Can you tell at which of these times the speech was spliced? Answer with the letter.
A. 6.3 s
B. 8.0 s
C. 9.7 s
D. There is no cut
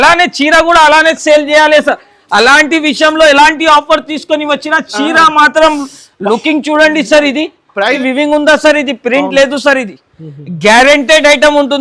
B